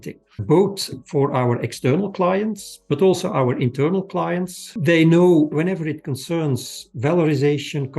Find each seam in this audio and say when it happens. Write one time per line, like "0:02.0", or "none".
0:02.7
0:04.6

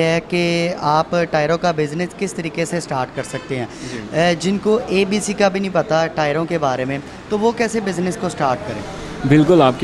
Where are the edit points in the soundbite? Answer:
none

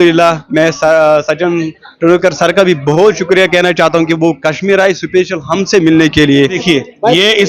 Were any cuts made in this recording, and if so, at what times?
0:06.6

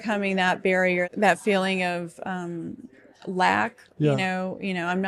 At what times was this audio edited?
0:01.1

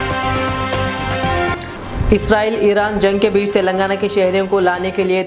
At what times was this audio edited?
0:01.6

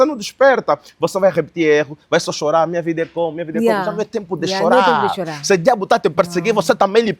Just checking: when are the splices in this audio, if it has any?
none

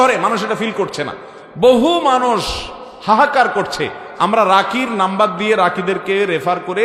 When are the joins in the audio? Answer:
none

